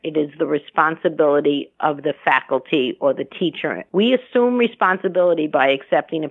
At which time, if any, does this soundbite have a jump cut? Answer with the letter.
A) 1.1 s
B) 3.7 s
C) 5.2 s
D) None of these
B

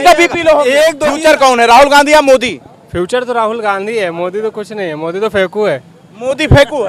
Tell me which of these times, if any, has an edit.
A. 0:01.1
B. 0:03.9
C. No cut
A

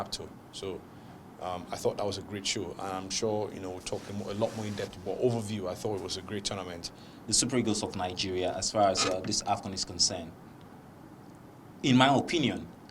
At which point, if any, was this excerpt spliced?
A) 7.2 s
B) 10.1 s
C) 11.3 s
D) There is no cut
A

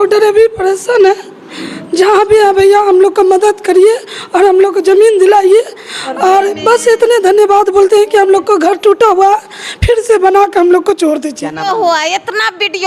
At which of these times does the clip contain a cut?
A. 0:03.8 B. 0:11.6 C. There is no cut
B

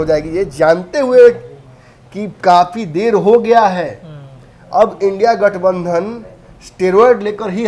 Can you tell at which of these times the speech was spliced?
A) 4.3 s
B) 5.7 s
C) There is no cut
C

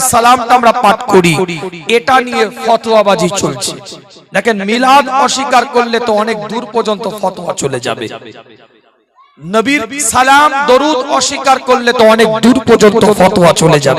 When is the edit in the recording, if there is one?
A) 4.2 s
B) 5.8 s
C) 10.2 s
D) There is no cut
D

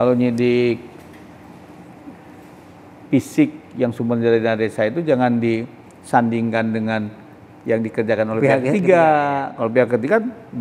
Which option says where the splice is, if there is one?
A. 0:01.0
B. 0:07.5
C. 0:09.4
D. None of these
D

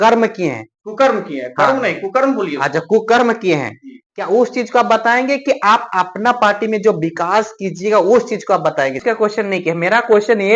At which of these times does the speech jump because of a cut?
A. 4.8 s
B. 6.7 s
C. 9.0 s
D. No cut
C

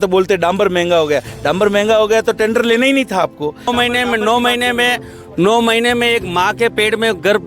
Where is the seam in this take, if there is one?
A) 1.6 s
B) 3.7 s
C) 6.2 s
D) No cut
B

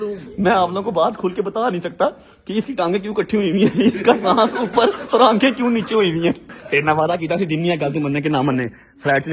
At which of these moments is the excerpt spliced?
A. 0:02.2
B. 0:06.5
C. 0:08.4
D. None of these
B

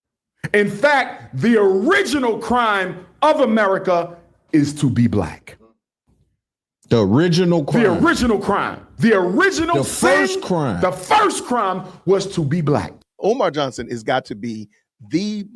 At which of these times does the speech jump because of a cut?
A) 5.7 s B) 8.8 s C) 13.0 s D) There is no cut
C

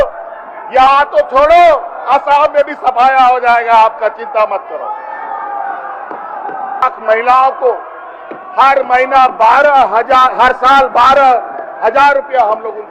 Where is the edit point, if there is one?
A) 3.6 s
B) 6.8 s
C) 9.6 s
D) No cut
B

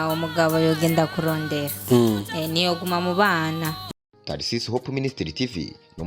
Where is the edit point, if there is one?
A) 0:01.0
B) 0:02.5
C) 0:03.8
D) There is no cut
C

